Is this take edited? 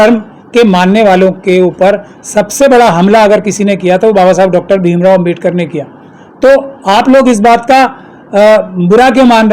no; 0 cuts

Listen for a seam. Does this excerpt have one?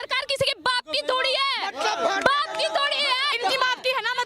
yes; 1 cut; at 3.3 s

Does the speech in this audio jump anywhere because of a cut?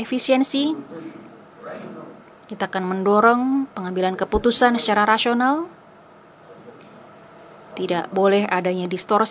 yes; 2 cuts; at 2.3 s, 6.5 s

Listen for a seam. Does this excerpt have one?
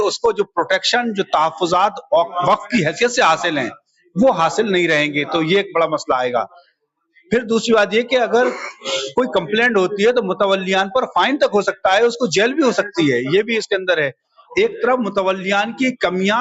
yes; 1 cut; at 14.4 s

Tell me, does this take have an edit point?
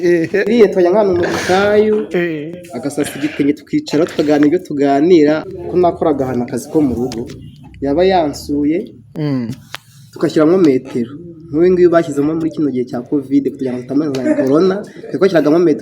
yes; 1 cut; at 5.4 s

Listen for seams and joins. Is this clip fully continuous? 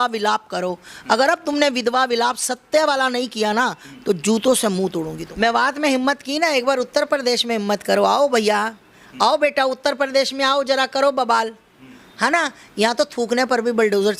no; 1 cut; at 5.2 s

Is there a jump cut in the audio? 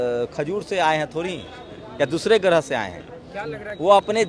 no; 0 cuts

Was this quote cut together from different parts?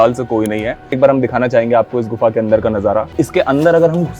yes; 2 cuts; at 1.0 s, 3.1 s

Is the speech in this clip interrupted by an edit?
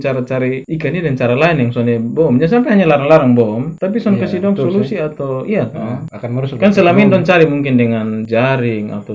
no; 0 cuts

